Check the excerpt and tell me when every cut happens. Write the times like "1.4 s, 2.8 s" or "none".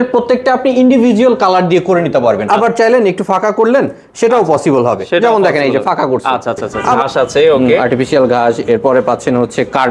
2.4 s, 7.0 s